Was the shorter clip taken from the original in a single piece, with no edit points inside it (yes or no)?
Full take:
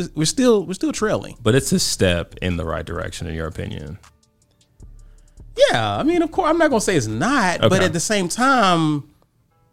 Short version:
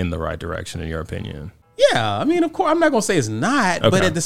no